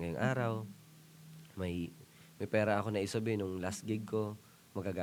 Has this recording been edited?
no; 0 cuts

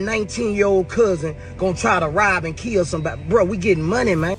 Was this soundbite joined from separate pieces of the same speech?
no; 0 cuts

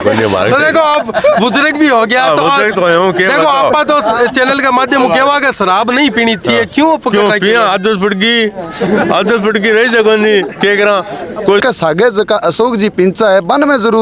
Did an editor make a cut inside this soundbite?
yes; 1 cut; at 11.6 s

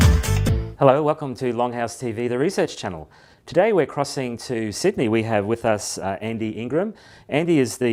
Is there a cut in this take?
no; 0 cuts

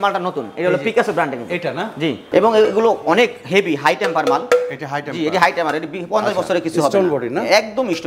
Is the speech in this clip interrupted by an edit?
yes; 1 cut; at 2.2 s

